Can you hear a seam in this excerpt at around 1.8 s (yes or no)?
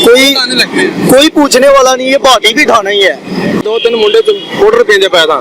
no